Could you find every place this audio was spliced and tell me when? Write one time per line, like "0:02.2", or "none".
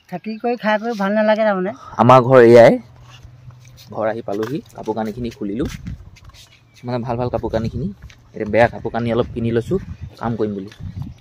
0:01.8